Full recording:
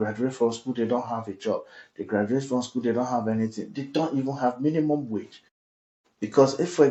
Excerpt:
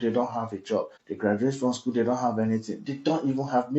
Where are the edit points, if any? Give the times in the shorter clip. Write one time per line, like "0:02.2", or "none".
0:01.0

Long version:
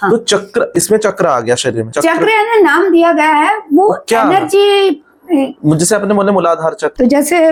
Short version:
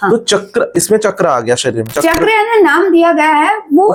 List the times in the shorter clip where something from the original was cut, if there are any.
none

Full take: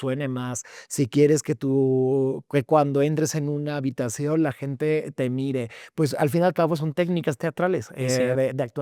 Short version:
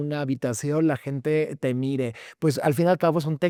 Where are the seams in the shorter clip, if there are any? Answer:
none

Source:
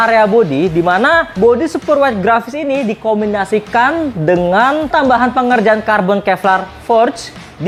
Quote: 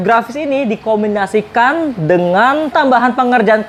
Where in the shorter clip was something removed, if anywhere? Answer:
none

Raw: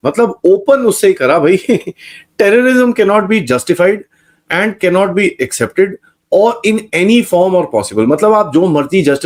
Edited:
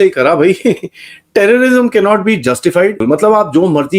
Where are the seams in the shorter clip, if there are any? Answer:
0:03.0

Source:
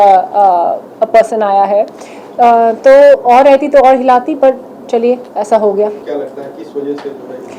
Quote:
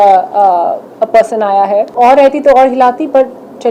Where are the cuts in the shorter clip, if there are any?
0:01.9

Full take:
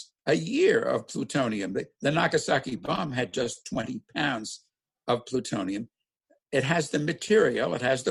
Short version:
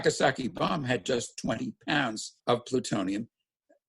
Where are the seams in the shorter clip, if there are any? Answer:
0:02.3

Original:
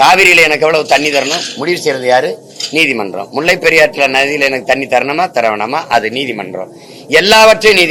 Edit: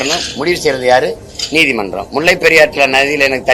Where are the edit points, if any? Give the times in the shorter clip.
none

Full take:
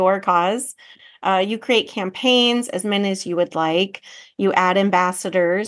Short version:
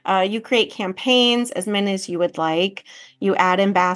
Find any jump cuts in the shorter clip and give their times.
none

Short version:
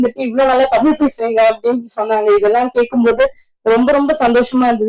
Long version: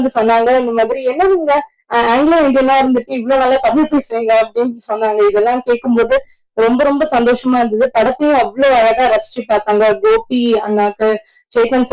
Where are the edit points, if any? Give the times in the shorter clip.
none

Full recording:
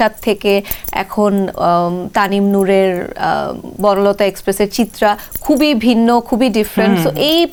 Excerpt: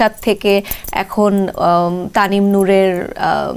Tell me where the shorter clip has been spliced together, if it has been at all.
none

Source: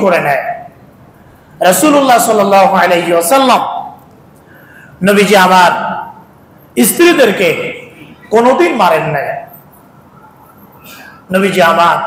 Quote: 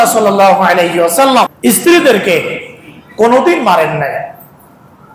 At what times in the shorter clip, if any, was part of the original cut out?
0:01.5

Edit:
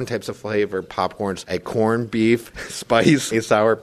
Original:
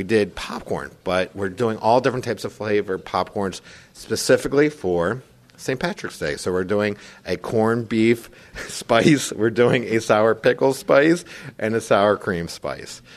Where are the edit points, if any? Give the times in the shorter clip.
0:01.4
0:03.1

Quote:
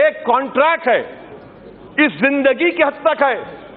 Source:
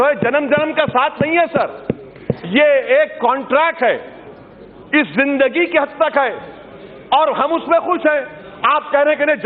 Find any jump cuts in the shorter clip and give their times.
none

